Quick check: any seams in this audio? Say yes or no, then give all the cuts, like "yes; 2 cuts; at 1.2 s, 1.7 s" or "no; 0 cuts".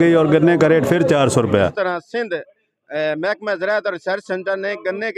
yes; 1 cut; at 1.7 s